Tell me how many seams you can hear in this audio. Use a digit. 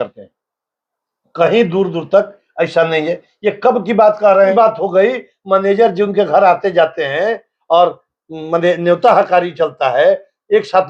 1